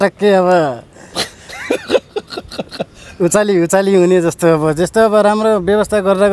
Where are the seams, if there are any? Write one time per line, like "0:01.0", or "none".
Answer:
none